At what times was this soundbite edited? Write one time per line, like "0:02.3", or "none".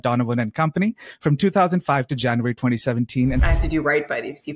0:03.5